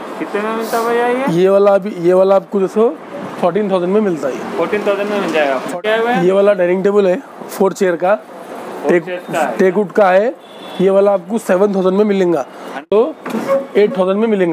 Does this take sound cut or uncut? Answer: cut